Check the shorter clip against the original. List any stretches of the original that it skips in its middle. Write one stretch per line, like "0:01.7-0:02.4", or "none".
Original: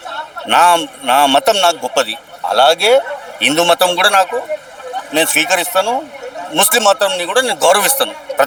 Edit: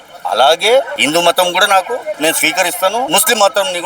0:03.2-0:03.4
0:04.6-0:05.1
0:06.0-0:06.5